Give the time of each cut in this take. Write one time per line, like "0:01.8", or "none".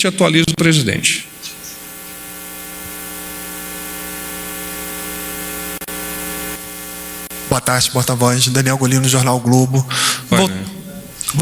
0:06.6